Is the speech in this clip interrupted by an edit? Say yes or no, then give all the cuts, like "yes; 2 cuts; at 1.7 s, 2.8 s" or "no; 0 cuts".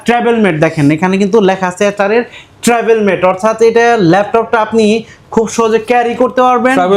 no; 0 cuts